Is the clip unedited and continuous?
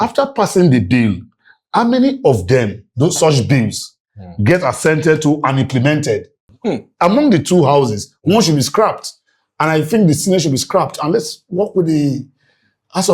no; 1 cut; at 6.4 s

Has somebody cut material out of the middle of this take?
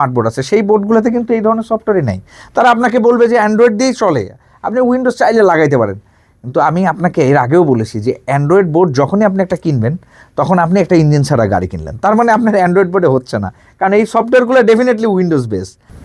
no; 0 cuts

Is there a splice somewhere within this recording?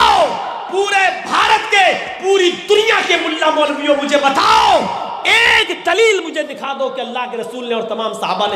no; 0 cuts

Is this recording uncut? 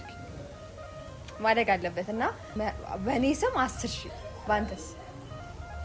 no; 2 cuts; at 2.5 s, 4.3 s

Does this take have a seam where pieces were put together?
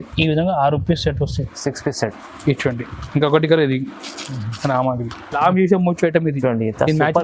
yes; 1 cut; at 5.2 s

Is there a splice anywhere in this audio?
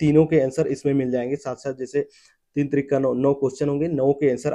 no; 0 cuts

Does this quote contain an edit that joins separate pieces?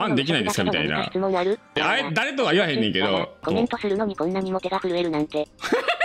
yes; 2 cuts; at 1.7 s, 3.4 s

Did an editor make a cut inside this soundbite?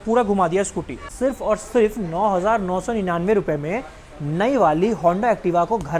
yes; 1 cut; at 1.0 s

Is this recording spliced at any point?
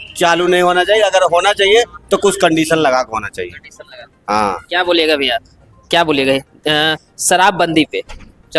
no; 0 cuts

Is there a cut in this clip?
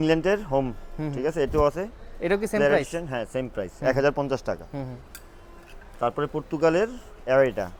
no; 0 cuts

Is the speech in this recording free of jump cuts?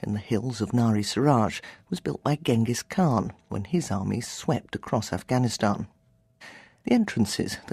no; 1 cut; at 3.9 s

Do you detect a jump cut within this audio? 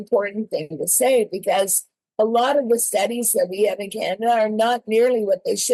no; 0 cuts

